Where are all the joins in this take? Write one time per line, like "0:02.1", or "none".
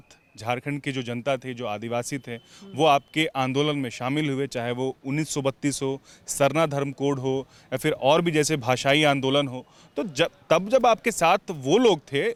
none